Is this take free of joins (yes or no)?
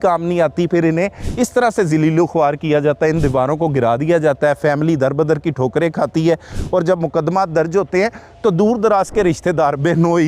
yes